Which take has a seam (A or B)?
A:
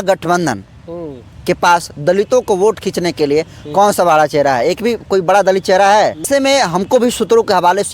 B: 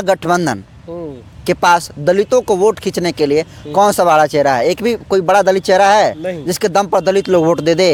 A